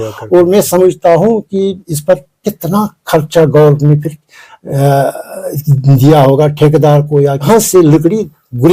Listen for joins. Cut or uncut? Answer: cut